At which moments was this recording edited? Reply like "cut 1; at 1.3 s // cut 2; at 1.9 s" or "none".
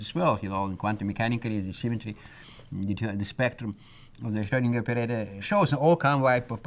cut 1; at 5.4 s